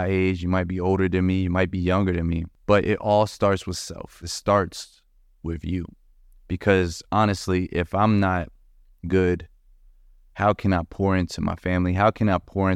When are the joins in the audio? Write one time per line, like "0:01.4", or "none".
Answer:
0:02.5
0:04.3